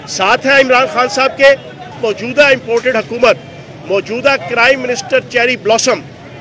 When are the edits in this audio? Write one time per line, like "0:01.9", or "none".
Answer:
0:01.9